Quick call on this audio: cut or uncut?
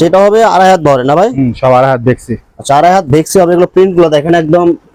uncut